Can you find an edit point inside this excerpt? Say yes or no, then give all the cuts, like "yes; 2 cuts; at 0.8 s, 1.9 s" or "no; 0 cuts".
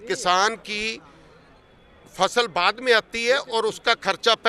no; 0 cuts